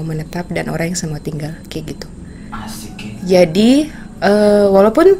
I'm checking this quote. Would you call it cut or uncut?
uncut